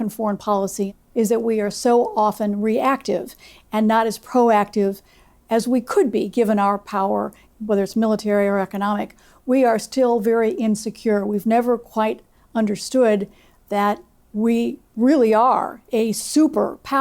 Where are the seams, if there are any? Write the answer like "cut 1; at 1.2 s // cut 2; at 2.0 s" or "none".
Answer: cut 1; at 1.0 s // cut 2; at 7.5 s